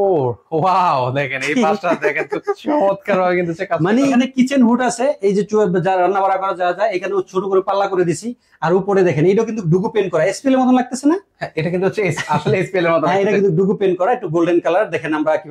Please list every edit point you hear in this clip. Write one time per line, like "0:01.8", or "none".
0:04.3